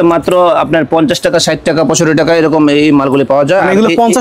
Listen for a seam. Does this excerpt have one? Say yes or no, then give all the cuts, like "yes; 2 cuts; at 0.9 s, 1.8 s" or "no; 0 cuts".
no; 0 cuts